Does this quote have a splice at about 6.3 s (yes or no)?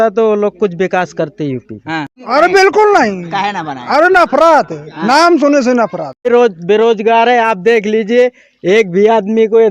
yes